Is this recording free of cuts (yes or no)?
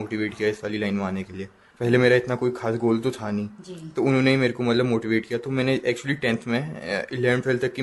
yes